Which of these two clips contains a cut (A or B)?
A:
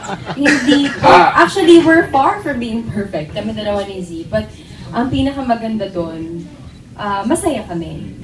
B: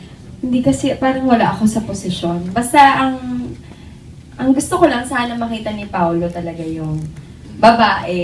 A